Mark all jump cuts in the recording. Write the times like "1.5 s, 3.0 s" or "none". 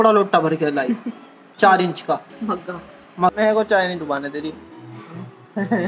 3.3 s